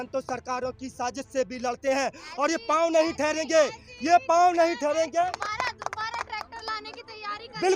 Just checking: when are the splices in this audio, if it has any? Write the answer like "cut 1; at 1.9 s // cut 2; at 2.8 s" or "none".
cut 1; at 5.3 s

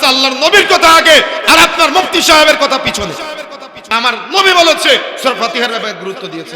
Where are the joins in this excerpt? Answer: cut 1; at 3.9 s

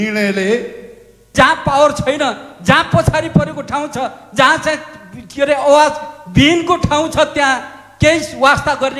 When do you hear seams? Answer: cut 1; at 1.2 s

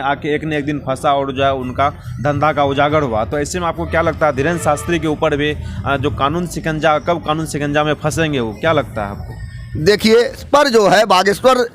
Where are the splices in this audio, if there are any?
cut 1; at 10.4 s

